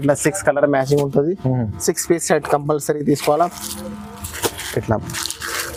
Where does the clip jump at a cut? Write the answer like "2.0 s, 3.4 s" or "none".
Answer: none